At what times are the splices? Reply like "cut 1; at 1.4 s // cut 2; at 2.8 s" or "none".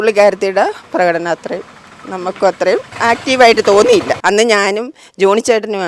cut 1; at 4.1 s